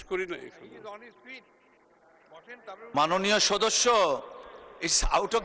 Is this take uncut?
yes; 0 cuts

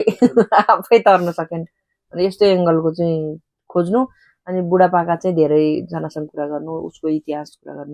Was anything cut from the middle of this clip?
no; 0 cuts

